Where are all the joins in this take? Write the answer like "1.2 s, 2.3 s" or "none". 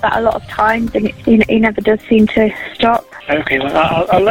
1.2 s, 3.1 s